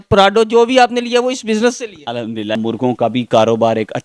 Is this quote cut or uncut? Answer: cut